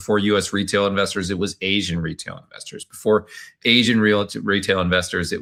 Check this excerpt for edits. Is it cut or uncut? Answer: uncut